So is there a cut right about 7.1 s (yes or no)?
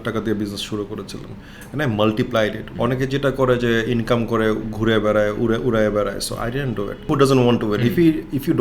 yes